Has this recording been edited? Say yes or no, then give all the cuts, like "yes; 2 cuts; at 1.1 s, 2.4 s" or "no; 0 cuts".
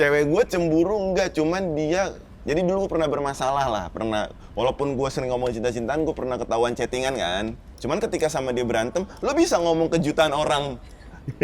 yes; 1 cut; at 7.7 s